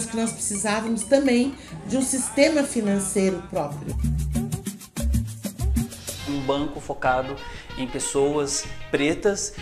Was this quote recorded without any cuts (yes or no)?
no